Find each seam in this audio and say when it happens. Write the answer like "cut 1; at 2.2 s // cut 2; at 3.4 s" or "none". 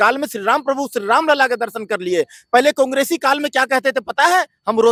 none